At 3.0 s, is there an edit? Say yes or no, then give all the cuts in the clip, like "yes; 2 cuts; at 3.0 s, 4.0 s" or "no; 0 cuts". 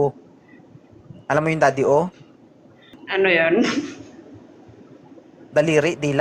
yes; 1 cut; at 3.0 s